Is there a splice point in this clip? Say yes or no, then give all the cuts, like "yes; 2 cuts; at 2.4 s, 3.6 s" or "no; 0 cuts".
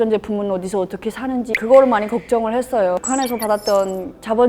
yes; 2 cuts; at 1.5 s, 3.0 s